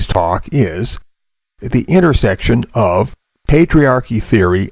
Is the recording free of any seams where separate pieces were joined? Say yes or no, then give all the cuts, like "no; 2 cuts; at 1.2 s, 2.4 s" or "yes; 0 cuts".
yes; 0 cuts